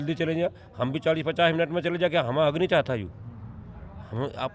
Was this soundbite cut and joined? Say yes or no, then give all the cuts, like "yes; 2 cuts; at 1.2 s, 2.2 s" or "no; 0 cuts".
no; 0 cuts